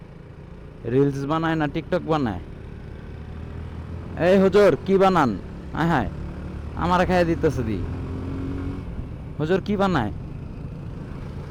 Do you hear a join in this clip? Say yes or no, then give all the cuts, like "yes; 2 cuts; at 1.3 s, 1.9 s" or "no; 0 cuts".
no; 0 cuts